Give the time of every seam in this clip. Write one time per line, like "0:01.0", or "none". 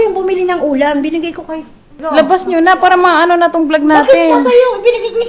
0:01.9